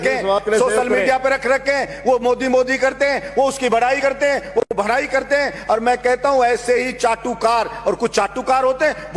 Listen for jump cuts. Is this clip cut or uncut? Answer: uncut